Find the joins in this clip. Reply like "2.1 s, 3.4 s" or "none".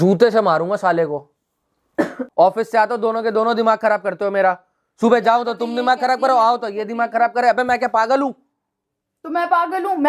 2.2 s